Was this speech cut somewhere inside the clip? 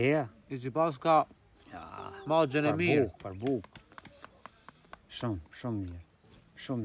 no; 0 cuts

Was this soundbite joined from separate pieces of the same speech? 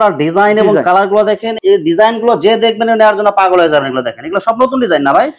no; 0 cuts

